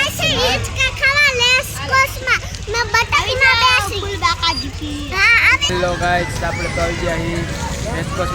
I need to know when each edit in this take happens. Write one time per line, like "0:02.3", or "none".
0:05.6